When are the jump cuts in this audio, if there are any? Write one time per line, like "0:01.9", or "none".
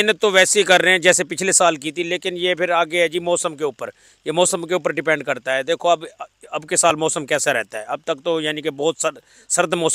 none